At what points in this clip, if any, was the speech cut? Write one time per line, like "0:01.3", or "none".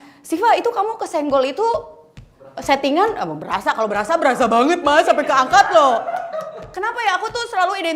0:06.6